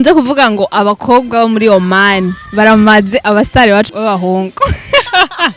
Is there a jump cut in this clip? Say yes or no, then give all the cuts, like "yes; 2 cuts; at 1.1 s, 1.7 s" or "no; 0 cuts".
yes; 1 cut; at 3.9 s